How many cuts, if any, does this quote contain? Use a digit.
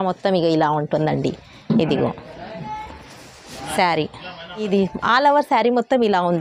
1